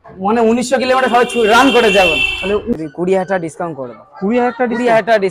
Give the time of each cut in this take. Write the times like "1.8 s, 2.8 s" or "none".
2.7 s